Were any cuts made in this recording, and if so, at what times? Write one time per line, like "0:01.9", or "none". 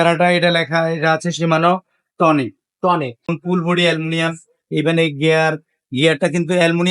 0:03.3